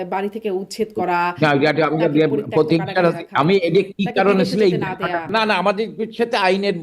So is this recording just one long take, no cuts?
no; 1 cut; at 5.3 s

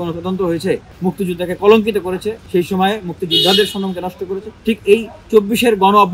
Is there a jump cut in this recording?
yes; 3 cuts; at 0.9 s, 2.4 s, 4.5 s

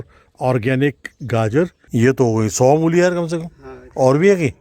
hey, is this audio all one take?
no; 1 cut; at 1.8 s

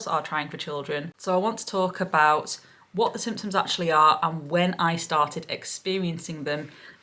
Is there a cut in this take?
yes; 1 cut; at 1.2 s

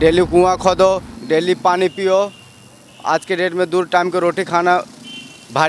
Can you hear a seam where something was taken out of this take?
no; 0 cuts

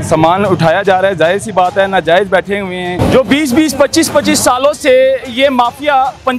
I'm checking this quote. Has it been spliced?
yes; 1 cut; at 2.9 s

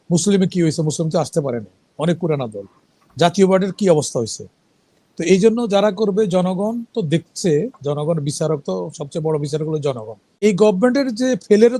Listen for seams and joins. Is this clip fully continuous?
no; 1 cut; at 10.4 s

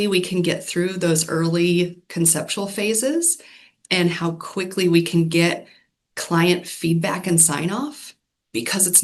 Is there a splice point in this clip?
no; 0 cuts

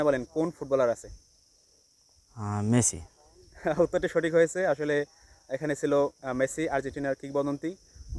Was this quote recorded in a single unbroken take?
yes; 0 cuts

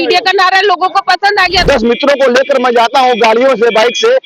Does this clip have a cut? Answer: yes; 1 cut; at 1.6 s

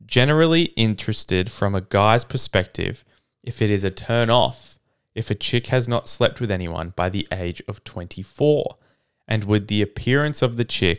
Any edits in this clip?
no; 0 cuts

